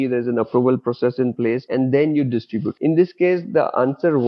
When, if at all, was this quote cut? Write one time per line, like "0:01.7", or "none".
0:01.6
0:02.7